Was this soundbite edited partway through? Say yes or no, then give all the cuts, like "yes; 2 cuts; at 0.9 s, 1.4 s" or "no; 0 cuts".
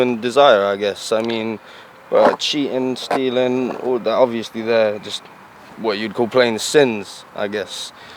no; 0 cuts